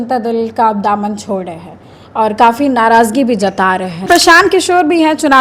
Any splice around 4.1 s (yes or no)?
yes